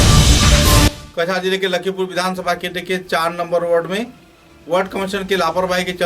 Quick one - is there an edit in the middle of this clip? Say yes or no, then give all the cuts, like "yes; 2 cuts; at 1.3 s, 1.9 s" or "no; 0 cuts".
no; 0 cuts